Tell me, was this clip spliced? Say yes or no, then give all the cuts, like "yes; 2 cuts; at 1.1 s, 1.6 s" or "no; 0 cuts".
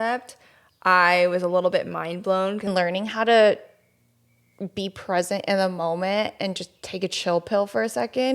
yes; 1 cut; at 2.7 s